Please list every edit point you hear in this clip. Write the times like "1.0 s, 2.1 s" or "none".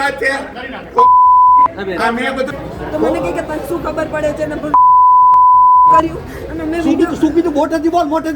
2.6 s